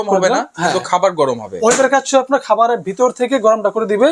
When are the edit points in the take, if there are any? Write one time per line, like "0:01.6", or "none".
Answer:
none